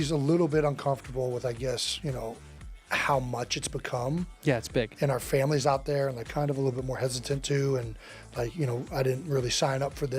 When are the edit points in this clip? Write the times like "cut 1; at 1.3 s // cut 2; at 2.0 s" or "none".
cut 1; at 6.3 s